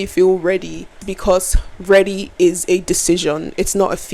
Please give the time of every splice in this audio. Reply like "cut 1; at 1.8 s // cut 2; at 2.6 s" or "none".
cut 1; at 1.1 s